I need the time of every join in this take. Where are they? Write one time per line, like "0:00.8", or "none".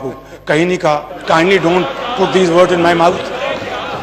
0:01.1